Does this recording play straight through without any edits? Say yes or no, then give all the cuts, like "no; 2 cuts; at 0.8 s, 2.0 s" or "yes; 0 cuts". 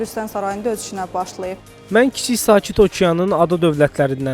no; 1 cut; at 1.6 s